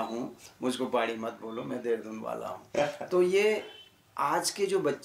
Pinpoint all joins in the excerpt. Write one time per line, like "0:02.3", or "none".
none